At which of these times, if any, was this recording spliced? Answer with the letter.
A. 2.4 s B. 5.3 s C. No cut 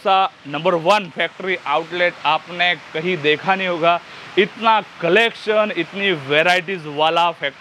C